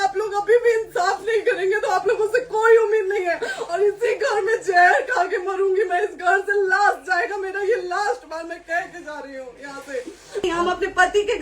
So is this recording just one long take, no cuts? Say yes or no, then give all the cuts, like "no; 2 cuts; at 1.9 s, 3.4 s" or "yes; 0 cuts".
no; 1 cut; at 10.4 s